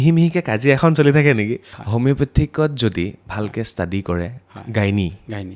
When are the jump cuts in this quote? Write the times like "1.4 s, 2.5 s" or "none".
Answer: 1.7 s